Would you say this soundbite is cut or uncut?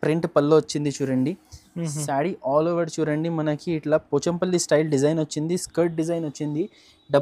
uncut